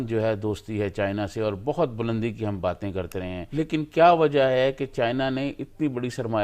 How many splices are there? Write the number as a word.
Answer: one